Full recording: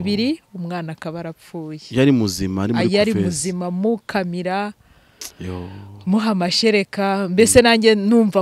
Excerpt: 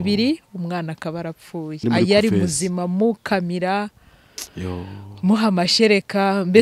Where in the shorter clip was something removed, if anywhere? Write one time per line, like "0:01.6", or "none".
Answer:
0:01.8